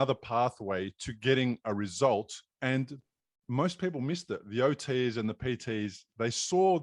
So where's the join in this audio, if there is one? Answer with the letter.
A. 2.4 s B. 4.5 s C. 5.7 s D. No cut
A